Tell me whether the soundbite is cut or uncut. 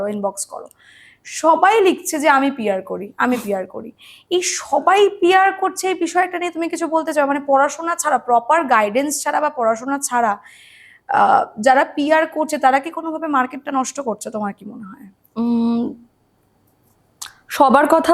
uncut